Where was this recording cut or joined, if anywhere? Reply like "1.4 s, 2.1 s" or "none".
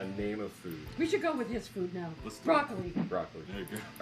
1.4 s, 3.1 s